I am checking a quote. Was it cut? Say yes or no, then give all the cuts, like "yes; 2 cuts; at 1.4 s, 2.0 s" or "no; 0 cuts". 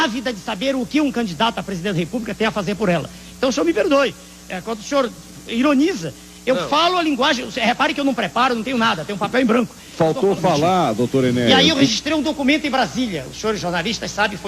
yes; 1 cut; at 11.5 s